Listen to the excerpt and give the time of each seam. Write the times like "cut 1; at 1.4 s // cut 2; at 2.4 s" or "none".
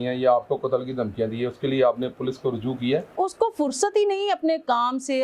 cut 1; at 3.2 s